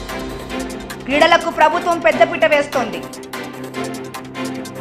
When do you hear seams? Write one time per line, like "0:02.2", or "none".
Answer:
0:01.0
0:03.5